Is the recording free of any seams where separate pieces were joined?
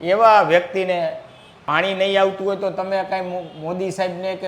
no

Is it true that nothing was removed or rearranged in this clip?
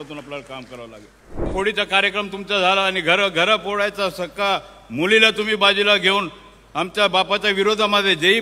no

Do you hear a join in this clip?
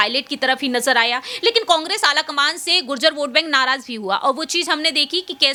no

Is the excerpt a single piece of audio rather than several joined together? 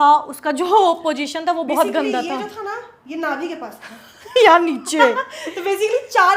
yes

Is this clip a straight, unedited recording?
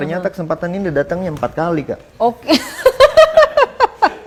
yes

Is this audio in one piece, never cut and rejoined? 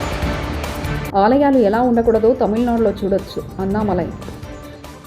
no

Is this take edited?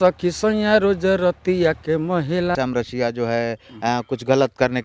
yes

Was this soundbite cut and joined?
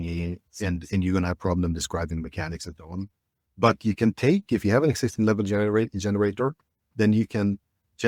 no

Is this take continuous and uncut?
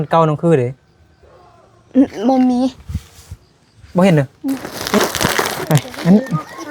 no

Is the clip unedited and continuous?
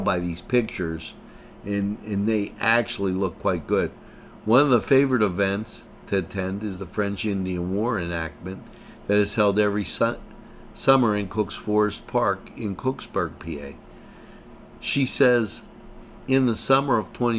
yes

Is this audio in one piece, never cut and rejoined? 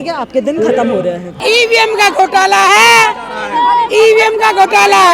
no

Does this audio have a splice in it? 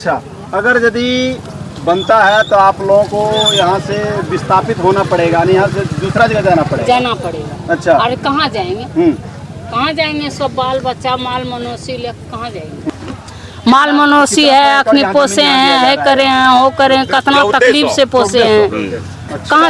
yes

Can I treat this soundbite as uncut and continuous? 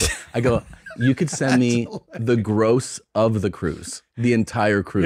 yes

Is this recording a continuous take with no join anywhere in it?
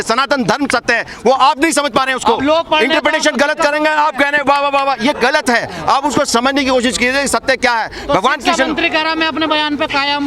yes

